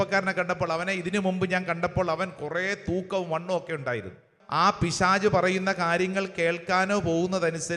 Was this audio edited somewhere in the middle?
yes; 1 cut; at 4.4 s

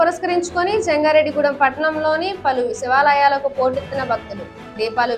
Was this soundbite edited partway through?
no; 0 cuts

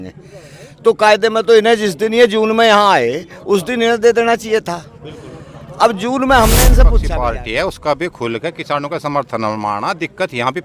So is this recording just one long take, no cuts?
no; 1 cut; at 7.0 s

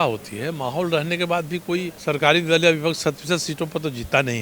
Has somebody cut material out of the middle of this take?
yes; 1 cut; at 1.9 s

